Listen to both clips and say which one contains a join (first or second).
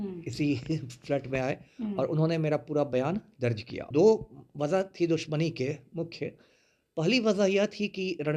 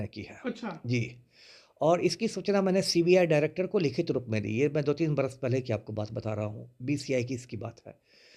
first